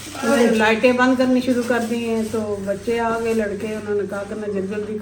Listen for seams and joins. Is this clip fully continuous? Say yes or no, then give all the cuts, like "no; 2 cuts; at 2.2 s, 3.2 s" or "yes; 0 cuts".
yes; 0 cuts